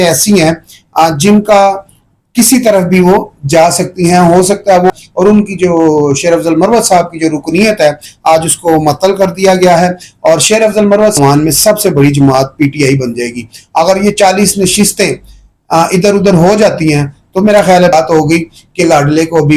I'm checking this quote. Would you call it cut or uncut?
cut